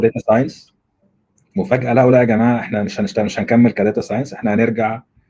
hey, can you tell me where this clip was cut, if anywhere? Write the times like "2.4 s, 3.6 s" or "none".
none